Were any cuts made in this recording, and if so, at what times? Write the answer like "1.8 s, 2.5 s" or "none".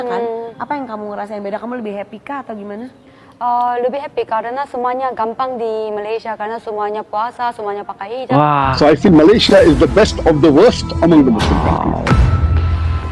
8.4 s